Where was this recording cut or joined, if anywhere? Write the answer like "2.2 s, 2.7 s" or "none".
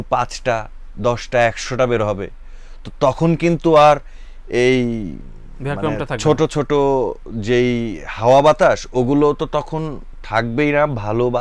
none